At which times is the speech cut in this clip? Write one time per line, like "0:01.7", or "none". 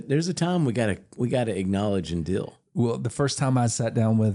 none